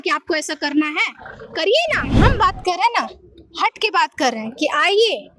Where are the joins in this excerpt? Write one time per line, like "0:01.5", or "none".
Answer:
0:02.1